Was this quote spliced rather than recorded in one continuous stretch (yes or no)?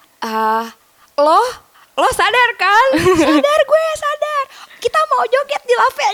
no